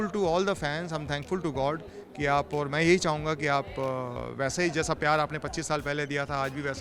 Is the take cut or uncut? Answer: uncut